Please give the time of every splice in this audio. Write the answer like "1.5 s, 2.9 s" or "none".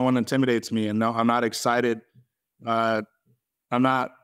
none

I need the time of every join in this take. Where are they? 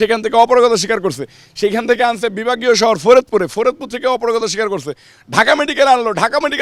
none

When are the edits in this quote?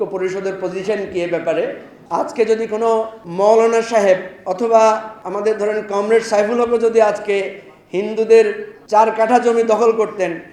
1.9 s, 3.2 s, 4.4 s, 5.2 s, 8.7 s

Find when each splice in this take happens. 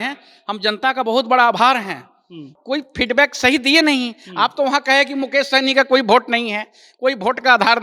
2.5 s

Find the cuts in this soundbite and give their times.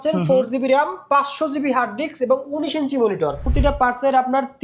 3.5 s

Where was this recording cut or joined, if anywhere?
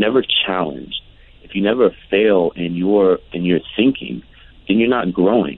3.3 s

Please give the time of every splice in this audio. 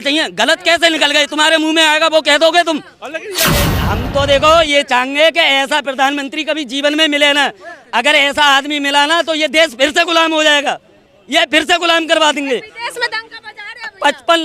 3.8 s

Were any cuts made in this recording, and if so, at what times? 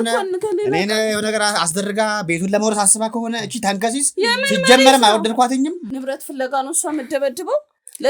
5.8 s

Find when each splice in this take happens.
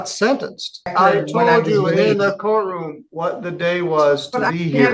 0.9 s

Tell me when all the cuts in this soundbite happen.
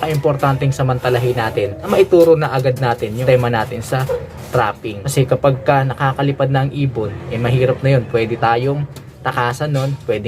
1.9 s, 3.2 s, 4.9 s

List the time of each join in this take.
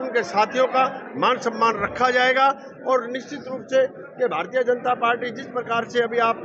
none

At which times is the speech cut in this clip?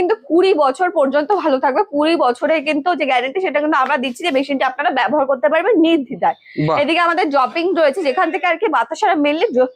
none

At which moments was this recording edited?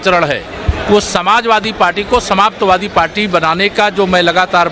none

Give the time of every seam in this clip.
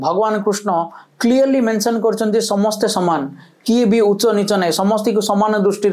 none

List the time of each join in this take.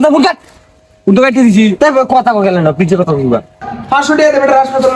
3.6 s

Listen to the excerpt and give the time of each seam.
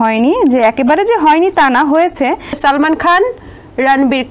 2.5 s

